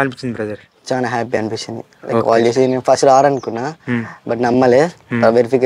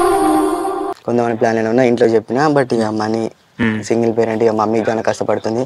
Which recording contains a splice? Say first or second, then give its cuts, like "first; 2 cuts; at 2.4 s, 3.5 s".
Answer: second; 1 cut; at 0.9 s